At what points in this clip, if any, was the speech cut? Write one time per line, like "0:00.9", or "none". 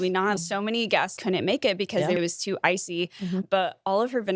0:02.2